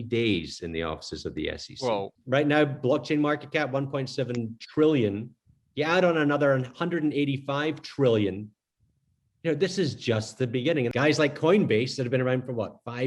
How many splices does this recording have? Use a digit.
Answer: 2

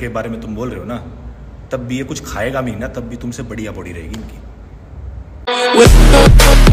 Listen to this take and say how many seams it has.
1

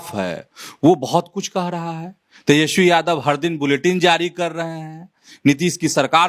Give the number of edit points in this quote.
0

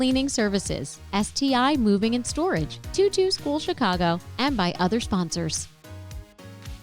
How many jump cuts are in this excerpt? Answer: 1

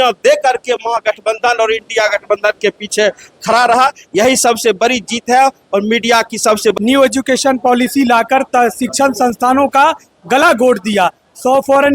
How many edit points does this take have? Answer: 1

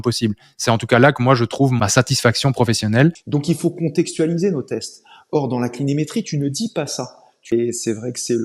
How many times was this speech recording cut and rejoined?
3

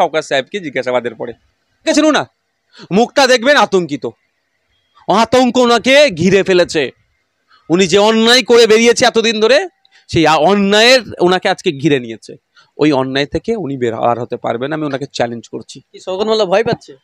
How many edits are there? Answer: 1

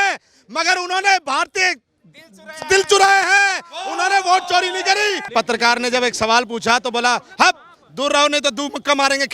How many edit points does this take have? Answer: 1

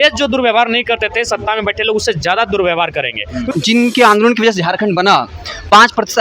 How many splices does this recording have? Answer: 1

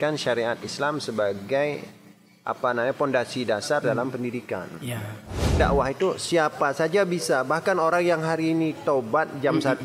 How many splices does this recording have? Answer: 1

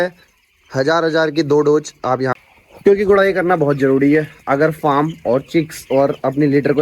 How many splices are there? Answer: 1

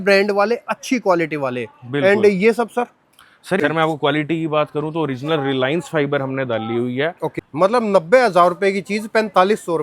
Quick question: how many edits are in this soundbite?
2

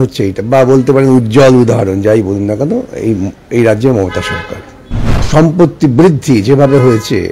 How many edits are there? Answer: 1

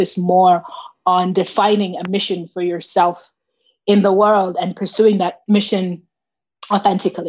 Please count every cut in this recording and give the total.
1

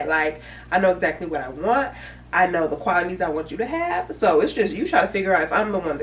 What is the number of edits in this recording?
0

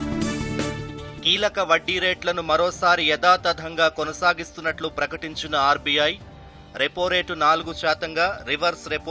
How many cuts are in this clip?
0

